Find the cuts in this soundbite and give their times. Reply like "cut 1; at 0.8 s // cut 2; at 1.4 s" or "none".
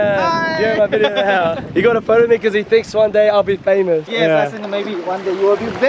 cut 1; at 1.6 s // cut 2; at 4.1 s